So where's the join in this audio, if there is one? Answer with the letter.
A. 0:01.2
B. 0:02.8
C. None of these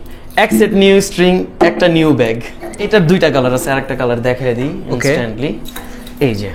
B